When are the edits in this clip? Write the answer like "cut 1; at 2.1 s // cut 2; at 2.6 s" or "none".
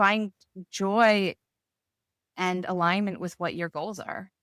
none